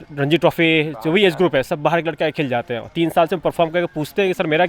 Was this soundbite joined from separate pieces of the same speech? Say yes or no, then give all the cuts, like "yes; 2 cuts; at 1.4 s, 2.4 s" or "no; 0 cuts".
no; 0 cuts